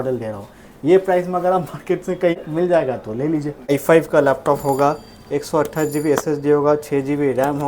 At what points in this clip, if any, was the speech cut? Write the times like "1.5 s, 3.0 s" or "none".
2.4 s, 3.7 s

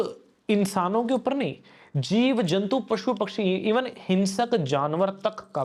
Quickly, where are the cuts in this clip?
none

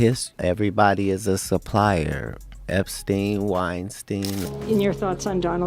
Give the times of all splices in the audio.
4.5 s

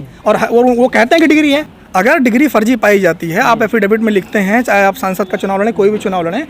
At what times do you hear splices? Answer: 1.8 s

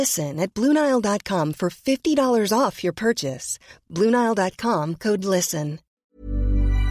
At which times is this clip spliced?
5.9 s

